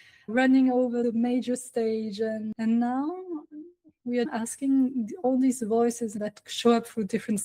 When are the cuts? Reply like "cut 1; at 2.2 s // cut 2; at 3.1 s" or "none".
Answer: cut 1; at 4.3 s // cut 2; at 6.2 s